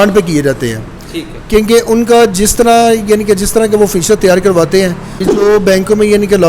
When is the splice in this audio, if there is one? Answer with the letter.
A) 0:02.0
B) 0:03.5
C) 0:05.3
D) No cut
C